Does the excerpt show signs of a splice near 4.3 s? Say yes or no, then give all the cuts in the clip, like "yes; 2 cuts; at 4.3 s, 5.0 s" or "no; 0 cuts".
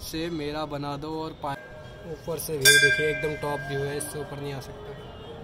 no; 1 cut; at 1.6 s